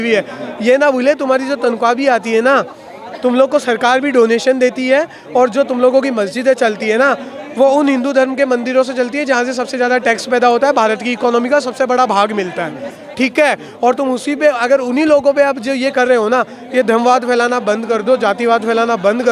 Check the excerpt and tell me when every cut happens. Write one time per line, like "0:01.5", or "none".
none